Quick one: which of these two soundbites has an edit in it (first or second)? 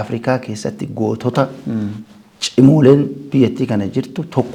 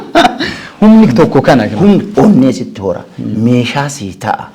second